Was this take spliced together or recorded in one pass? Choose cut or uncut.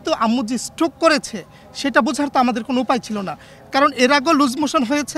uncut